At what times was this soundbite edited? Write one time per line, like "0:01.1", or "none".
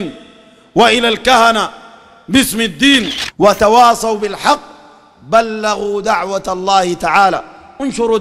0:03.2